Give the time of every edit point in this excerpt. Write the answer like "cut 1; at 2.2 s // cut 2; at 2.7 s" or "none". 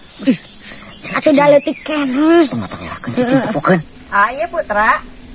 cut 1; at 3.9 s

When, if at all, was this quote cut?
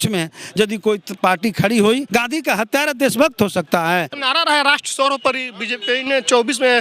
cut 1; at 2.0 s // cut 2; at 4.2 s

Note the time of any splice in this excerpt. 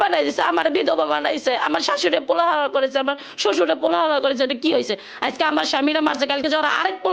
none

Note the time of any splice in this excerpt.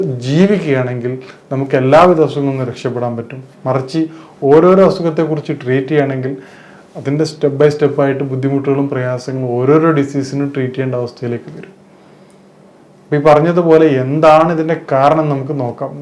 none

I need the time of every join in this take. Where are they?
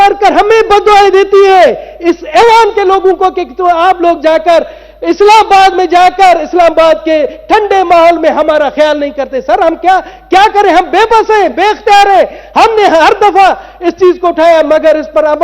none

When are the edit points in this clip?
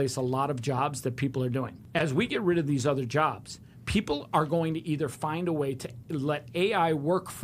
cut 1; at 1.8 s

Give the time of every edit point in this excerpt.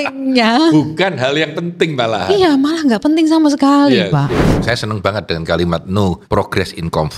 cut 1; at 4.5 s // cut 2; at 6.2 s

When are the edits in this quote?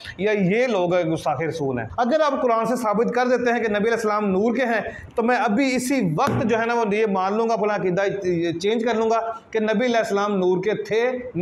cut 1; at 1.9 s

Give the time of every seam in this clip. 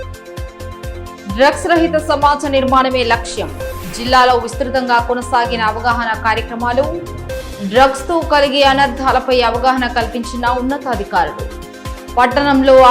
cut 1; at 1.0 s

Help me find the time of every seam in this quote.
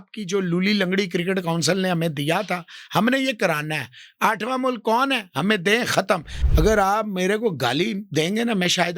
cut 1; at 6.4 s

